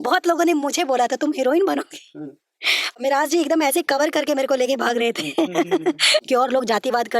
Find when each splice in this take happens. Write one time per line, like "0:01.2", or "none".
0:03.0
0:06.2